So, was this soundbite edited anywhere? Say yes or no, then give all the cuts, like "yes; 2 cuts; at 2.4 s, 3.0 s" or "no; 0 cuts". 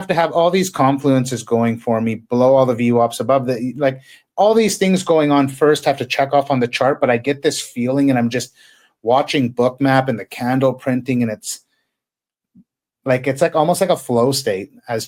no; 0 cuts